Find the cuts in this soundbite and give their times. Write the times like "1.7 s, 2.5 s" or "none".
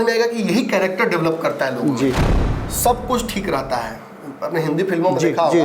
2.3 s